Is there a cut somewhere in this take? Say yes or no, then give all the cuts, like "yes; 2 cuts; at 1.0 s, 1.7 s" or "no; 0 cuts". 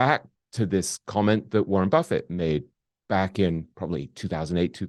no; 0 cuts